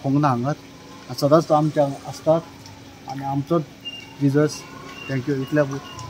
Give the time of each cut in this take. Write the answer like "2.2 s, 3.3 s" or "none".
none